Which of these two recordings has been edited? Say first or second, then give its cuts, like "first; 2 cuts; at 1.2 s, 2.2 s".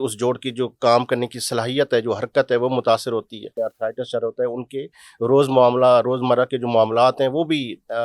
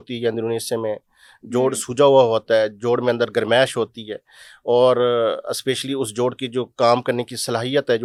first; 1 cut; at 3.5 s